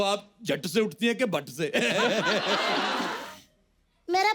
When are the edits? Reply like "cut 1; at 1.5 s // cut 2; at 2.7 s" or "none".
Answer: cut 1; at 3.1 s